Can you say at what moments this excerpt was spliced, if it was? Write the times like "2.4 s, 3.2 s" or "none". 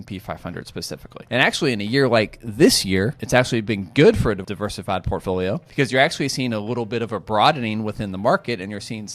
1.1 s, 3.2 s, 4.4 s, 5.7 s